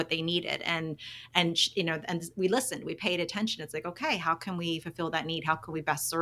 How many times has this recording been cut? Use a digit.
0